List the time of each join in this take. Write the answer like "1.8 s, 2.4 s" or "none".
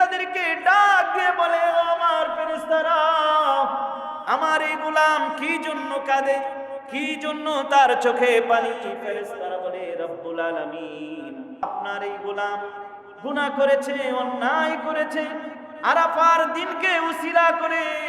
11.6 s